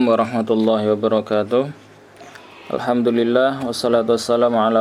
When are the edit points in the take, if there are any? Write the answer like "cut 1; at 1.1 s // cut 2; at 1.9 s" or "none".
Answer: cut 1; at 1.5 s